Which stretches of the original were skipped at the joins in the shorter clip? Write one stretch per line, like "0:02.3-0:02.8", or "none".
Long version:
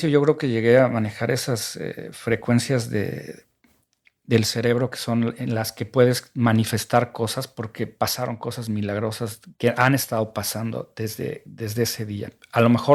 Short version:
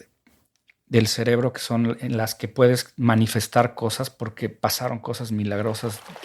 none